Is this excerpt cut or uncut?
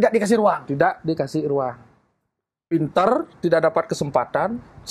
uncut